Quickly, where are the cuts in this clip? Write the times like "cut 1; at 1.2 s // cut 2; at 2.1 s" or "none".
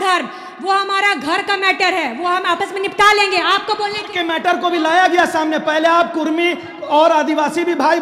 none